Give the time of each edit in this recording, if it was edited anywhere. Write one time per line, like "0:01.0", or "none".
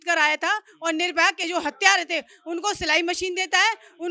0:01.4